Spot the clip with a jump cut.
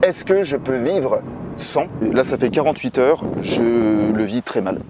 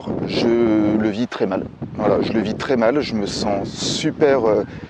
first; 1 cut; at 2.0 s

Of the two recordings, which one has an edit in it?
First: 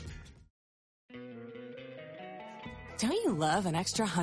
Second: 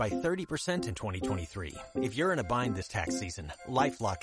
first; 1 cut; at 1.0 s

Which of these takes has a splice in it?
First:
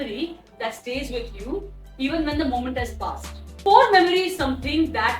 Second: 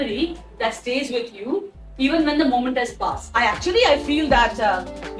second; 1 cut; at 3.4 s

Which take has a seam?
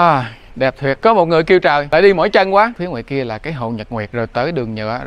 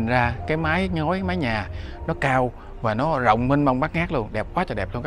first; 4 cuts; at 1.0 s, 1.9 s, 2.8 s, 4.1 s

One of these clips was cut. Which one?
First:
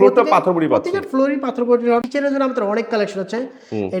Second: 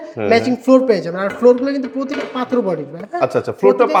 first; 1 cut; at 2.0 s

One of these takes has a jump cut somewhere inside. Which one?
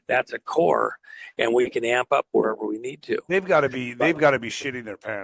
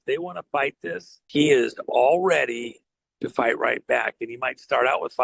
second; 1 cut; at 1.1 s

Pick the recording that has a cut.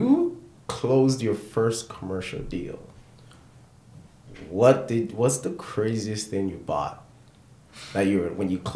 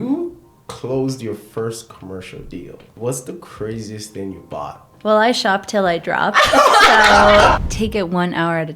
second; 3 cuts; at 2.9 s, 4.9 s, 7.6 s

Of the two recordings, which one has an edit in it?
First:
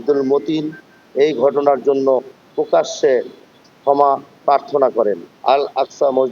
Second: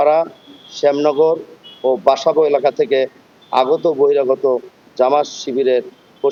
first; 1 cut; at 5.3 s

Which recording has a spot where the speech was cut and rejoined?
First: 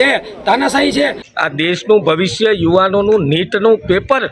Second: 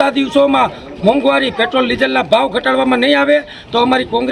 first; 1 cut; at 1.2 s

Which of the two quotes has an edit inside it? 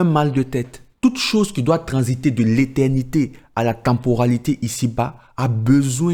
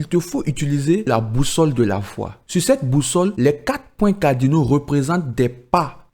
second; 2 cuts; at 1.1 s, 3.3 s

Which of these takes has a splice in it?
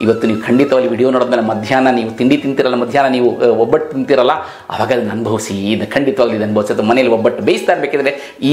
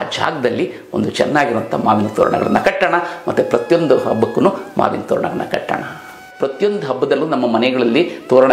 second; 1 cut; at 6.2 s

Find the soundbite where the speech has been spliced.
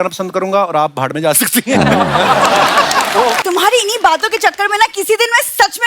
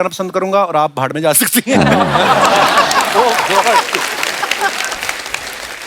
first; 1 cut; at 3.4 s

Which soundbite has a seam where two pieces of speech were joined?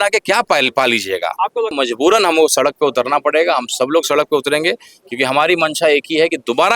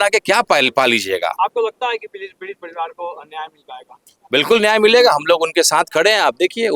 first; 1 cut; at 1.8 s

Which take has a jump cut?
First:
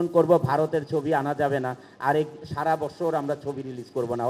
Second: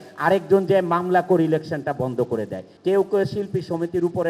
second; 1 cut; at 2.6 s

